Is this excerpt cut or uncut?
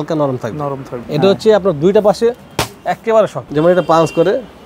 cut